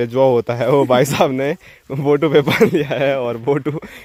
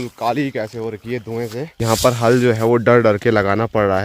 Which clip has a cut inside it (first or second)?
second